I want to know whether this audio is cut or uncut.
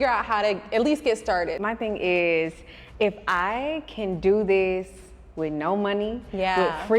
cut